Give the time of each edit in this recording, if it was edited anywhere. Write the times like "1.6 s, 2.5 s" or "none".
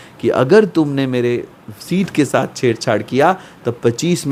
none